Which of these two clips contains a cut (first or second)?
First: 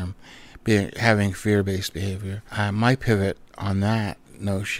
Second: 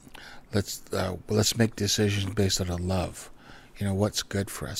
first